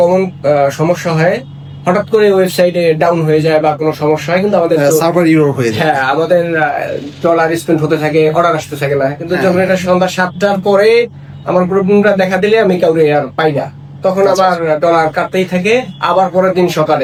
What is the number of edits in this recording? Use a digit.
0